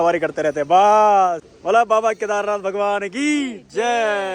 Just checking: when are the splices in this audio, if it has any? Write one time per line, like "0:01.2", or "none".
0:01.5